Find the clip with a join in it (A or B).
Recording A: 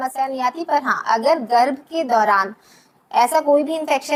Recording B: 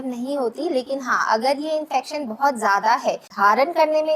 B